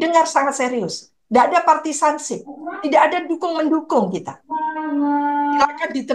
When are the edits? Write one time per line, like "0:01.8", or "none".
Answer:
none